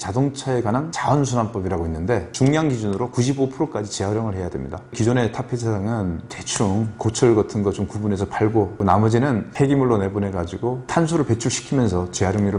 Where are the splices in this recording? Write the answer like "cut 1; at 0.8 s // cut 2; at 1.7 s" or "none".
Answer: cut 1; at 0.9 s // cut 2; at 2.3 s // cut 3; at 8.8 s // cut 4; at 10.9 s